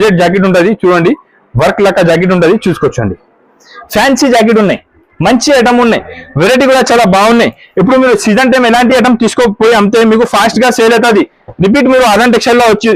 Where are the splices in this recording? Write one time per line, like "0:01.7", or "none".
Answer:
none